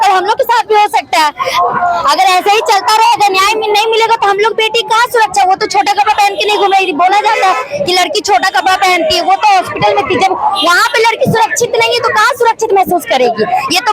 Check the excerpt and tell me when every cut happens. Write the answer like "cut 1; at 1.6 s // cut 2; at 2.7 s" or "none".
none